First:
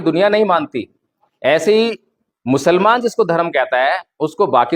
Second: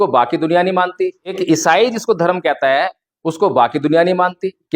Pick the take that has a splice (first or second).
second